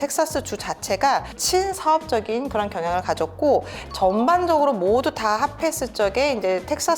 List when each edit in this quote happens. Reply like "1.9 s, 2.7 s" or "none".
3.8 s